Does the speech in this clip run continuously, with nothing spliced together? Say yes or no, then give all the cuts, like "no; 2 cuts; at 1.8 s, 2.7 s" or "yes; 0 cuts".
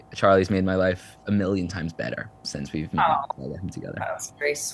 yes; 0 cuts